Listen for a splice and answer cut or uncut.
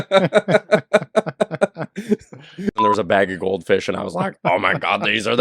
cut